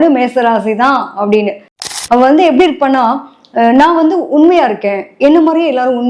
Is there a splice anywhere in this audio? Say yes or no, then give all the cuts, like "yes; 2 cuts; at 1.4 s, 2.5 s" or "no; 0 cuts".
yes; 1 cut; at 2.0 s